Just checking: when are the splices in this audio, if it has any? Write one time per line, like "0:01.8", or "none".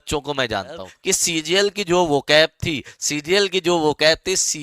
0:00.9